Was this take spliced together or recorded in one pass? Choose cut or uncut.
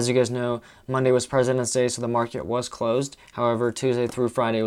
uncut